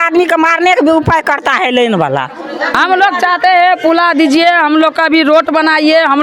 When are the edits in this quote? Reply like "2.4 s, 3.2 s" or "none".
2.7 s

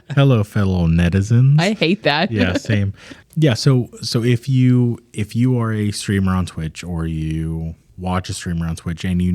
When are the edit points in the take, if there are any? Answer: none

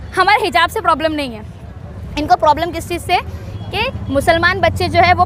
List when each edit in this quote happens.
none

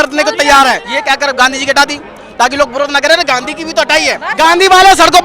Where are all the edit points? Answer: 0.9 s, 4.2 s

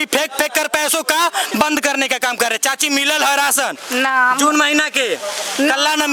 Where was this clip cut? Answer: none

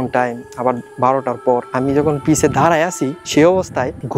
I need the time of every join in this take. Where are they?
1.7 s

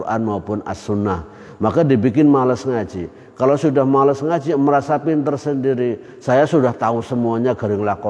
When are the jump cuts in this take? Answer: none

